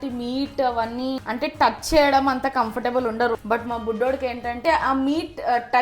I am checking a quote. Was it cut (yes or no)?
yes